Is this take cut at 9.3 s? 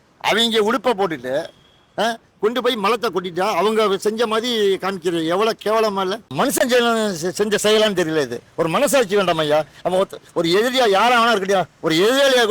no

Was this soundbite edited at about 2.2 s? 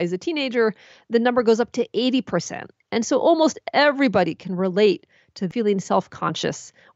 no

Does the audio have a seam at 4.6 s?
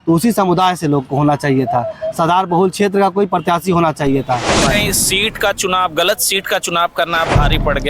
yes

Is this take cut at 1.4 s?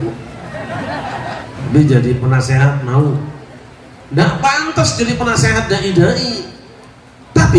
yes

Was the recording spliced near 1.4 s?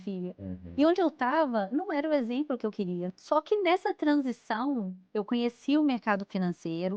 no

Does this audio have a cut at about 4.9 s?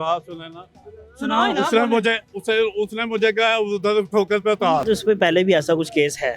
yes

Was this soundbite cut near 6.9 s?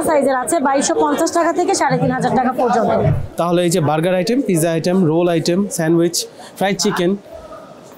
no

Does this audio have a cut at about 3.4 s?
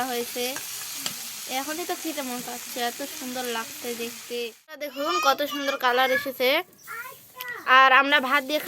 no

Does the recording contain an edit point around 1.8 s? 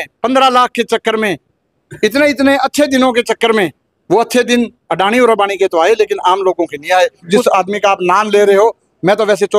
no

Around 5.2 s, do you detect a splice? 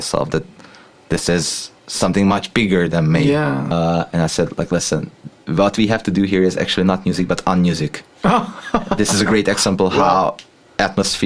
no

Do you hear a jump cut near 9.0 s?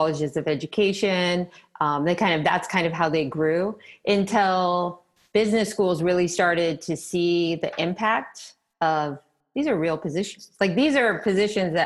no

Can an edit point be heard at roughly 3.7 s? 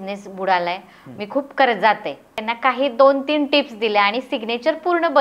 no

